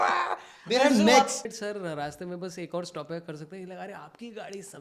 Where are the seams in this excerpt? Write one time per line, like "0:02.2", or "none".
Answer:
0:01.4